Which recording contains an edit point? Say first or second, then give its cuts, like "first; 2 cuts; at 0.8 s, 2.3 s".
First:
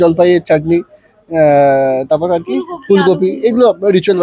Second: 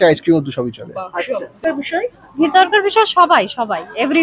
second; 1 cut; at 1.6 s